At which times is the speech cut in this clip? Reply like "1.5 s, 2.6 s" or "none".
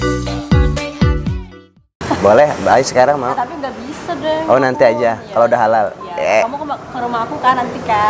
1.9 s